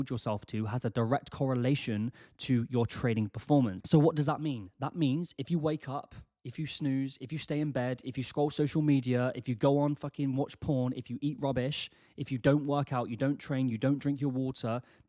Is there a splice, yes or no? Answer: no